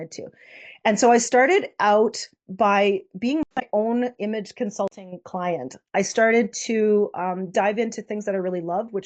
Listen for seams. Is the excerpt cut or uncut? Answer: uncut